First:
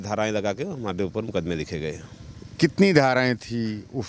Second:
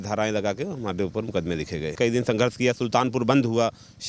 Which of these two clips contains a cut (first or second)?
second